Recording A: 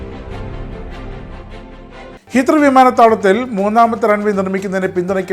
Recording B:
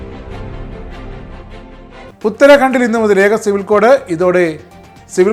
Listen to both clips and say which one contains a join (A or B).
A